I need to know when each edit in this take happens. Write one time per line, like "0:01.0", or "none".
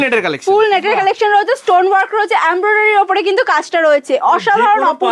none